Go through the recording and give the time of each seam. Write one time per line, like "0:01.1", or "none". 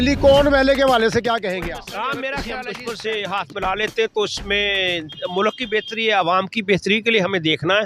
0:02.6